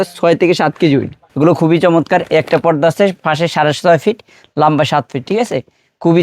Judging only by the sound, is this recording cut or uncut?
cut